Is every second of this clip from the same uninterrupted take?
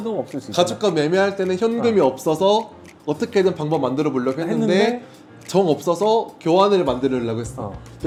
yes; 0 cuts

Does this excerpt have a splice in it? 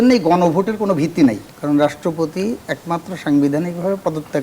yes; 1 cut; at 1.5 s

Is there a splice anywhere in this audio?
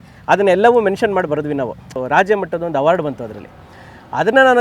yes; 1 cut; at 1.9 s

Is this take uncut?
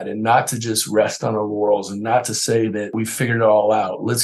no; 1 cut; at 2.9 s

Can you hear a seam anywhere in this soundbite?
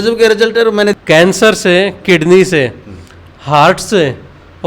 yes; 1 cut; at 1.3 s

